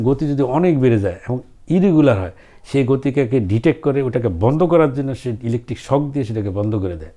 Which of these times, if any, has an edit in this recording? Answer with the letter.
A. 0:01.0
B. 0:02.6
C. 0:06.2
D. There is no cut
D